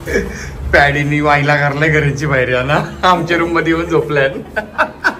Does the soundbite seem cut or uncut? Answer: uncut